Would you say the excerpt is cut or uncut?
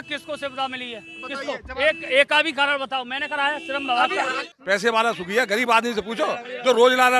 cut